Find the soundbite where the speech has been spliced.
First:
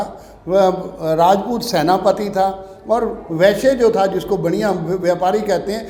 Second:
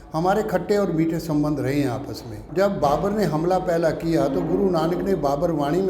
second; 1 cut; at 2.4 s

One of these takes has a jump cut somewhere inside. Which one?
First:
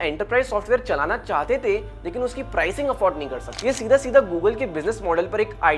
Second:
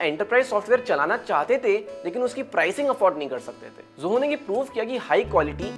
first; 1 cut; at 3.5 s

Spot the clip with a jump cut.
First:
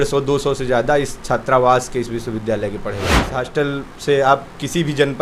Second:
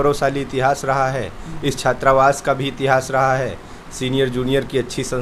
first; 1 cut; at 3.2 s

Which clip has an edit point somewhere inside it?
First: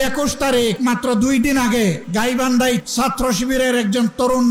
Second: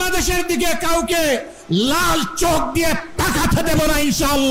first; 3 cuts; at 0.8 s, 2.0 s, 2.8 s

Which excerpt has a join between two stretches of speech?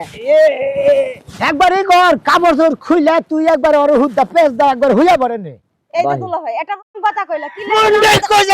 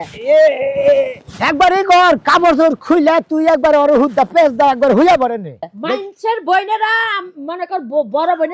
second; 1 cut; at 5.7 s

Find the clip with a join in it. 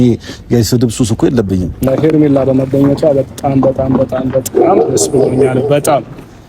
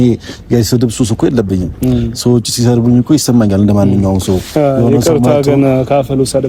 first; 1 cut; at 1.9 s

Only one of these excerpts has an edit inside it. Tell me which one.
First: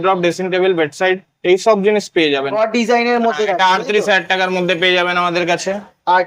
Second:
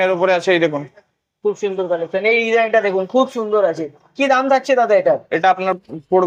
first; 1 cut; at 2.6 s

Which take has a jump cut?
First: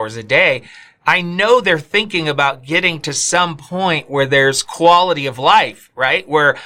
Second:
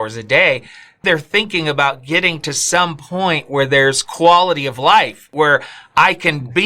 second; 2 cuts; at 1.0 s, 5.3 s

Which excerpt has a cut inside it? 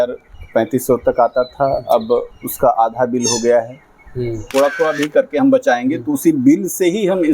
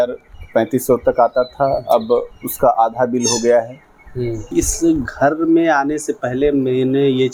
first; 1 cut; at 4.4 s

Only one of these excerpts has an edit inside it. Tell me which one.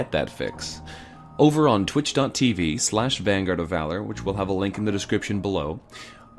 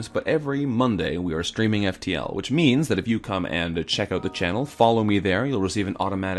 second; 1 cut; at 4.2 s

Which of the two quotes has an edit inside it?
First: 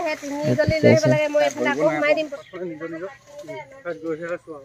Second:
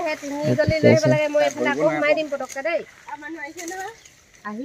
first; 1 cut; at 2.3 s

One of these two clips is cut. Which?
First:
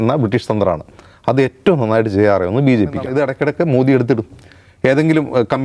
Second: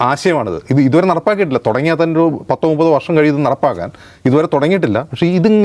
first; 1 cut; at 3.1 s

